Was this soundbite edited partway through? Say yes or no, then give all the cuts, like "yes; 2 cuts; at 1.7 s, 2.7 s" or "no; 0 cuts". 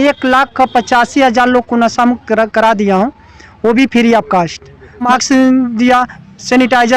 yes; 1 cut; at 5.1 s